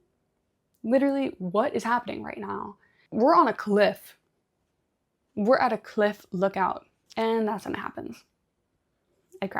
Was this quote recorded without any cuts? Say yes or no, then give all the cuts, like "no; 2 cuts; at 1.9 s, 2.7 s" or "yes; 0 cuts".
no; 2 cuts; at 3.0 s, 6.9 s